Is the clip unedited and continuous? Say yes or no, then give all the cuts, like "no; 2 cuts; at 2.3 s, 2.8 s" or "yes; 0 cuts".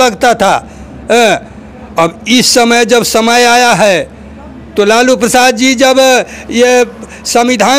yes; 0 cuts